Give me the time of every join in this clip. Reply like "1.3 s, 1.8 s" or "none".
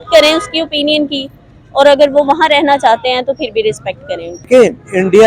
4.3 s